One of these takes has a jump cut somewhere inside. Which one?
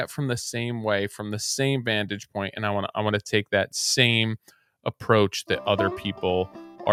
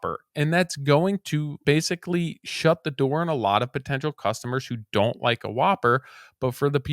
second; 1 cut; at 1.6 s

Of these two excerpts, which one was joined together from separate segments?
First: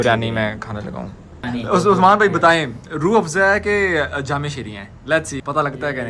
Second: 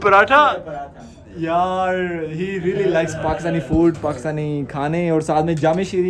first; 1 cut; at 1.3 s

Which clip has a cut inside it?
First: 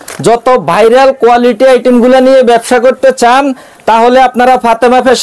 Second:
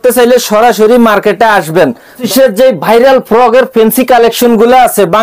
second; 1 cut; at 2.3 s

